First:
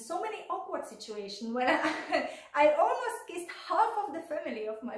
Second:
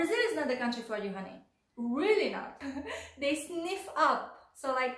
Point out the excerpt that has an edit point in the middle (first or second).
second